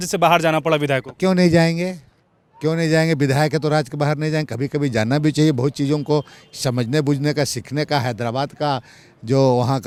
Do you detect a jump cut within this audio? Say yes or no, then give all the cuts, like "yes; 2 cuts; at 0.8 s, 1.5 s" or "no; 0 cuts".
no; 0 cuts